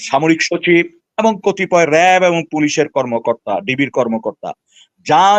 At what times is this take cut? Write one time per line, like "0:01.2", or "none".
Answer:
none

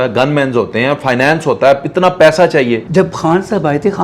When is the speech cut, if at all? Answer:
0:02.8

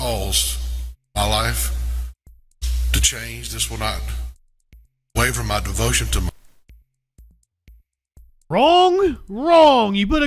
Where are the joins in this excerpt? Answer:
none

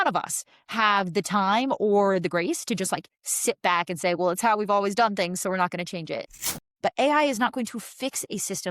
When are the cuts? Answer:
0:06.3

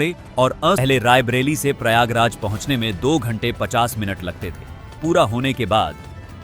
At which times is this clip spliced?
0:00.8
0:05.0

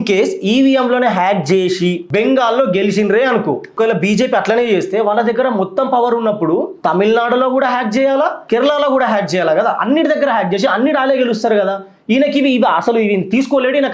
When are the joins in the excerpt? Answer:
0:02.0
0:03.7
0:06.7
0:08.4

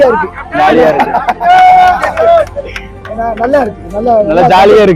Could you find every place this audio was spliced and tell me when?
none

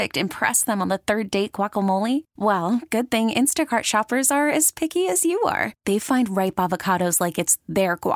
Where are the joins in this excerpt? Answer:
none

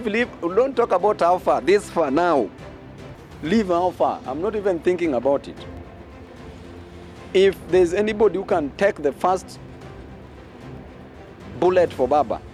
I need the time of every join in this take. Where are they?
none

